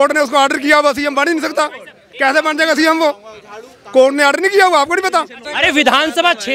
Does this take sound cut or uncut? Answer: cut